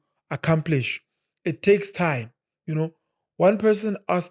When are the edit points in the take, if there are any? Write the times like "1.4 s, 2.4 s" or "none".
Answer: none